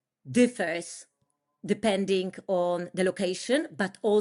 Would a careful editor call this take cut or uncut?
uncut